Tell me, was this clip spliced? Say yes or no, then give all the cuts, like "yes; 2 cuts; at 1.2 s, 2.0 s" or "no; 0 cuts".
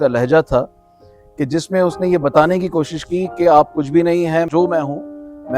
yes; 1 cut; at 4.5 s